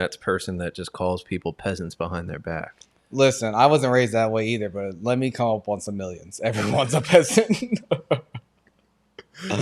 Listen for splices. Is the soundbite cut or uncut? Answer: uncut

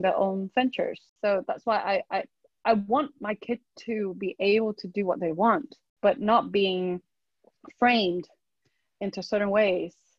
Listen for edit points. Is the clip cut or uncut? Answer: cut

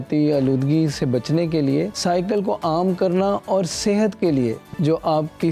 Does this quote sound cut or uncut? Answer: cut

